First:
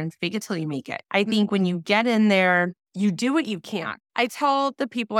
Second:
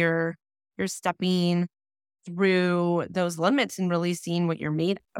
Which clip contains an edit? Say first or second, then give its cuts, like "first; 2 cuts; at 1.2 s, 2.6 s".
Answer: first; 3 cuts; at 1.0 s, 2.8 s, 3.9 s